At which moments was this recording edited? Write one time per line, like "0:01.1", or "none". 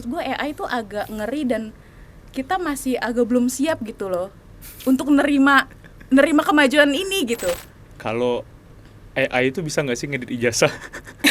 0:07.6